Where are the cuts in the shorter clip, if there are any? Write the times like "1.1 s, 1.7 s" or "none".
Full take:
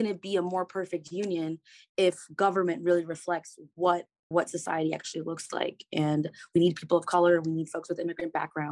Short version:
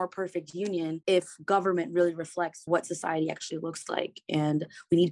1.0 s, 2.6 s